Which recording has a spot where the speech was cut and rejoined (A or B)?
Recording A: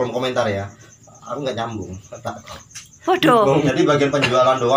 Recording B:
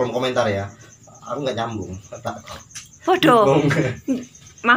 A